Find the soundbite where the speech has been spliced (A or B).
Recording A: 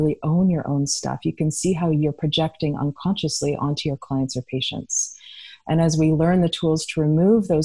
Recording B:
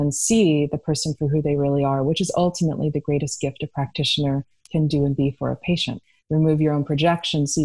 B